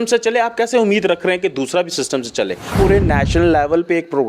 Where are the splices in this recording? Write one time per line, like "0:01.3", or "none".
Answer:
0:02.7